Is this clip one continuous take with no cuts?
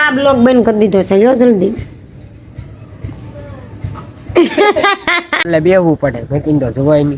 no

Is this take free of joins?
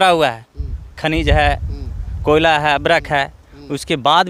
yes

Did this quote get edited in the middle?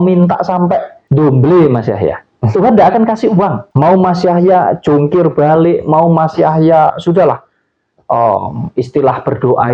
yes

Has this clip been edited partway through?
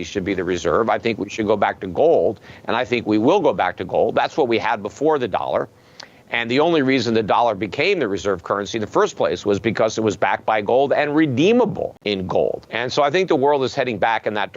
yes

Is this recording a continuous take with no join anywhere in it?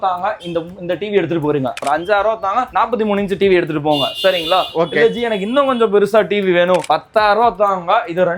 no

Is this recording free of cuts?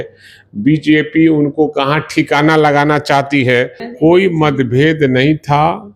no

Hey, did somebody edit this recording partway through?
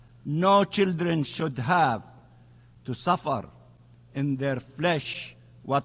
no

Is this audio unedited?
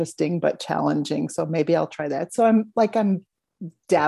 yes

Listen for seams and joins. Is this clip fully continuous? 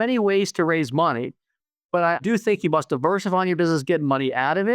no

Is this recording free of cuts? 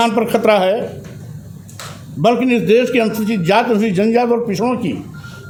yes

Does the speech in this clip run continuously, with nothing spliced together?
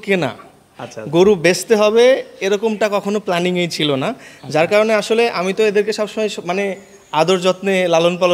yes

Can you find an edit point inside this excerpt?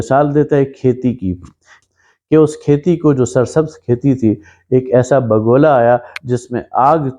yes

